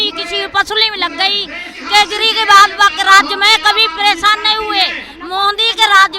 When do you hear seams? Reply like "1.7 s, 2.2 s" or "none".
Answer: 1.7 s